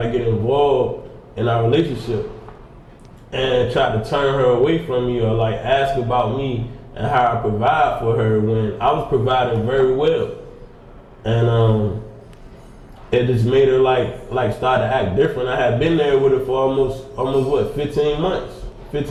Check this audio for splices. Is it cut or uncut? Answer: uncut